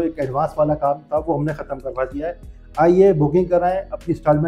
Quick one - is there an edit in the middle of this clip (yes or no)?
no